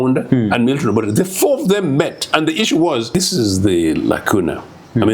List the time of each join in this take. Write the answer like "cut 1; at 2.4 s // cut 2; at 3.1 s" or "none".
cut 1; at 3.1 s